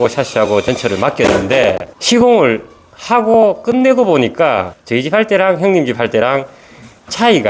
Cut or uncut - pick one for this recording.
uncut